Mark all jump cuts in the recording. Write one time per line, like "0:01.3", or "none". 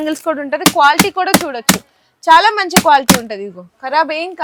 none